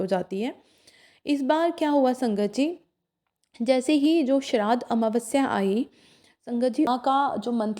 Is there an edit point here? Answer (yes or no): yes